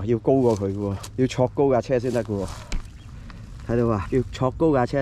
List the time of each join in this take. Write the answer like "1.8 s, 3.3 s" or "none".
1.0 s, 4.0 s